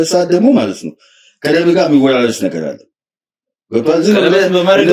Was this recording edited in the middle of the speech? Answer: no; 0 cuts

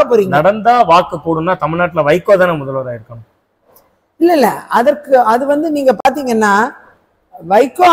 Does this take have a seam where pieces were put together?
no; 0 cuts

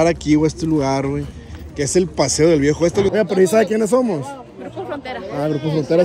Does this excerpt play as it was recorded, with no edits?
no; 1 cut; at 3.1 s

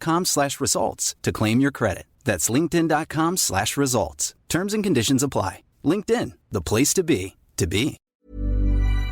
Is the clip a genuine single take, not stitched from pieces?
no; 1 cut; at 8.1 s

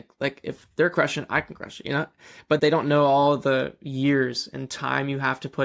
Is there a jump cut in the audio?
yes; 1 cut; at 2.6 s

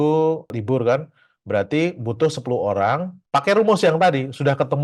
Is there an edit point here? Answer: no; 0 cuts

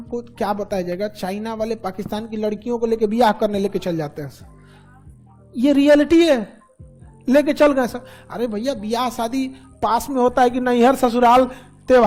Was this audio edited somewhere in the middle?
no; 0 cuts

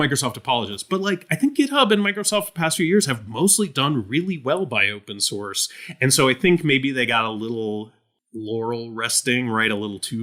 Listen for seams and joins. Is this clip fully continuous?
yes; 0 cuts

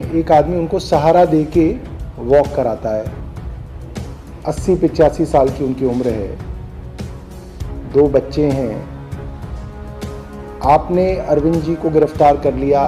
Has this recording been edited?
yes; 4 cuts; at 3.1 s, 4.4 s, 8.9 s, 10.6 s

